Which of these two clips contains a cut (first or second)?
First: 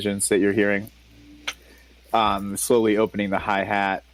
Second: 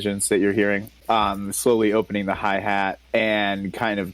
second